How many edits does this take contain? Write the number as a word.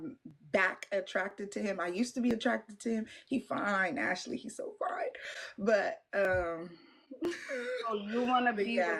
zero